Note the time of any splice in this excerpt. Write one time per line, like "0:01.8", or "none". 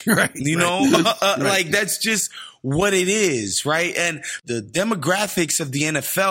0:04.4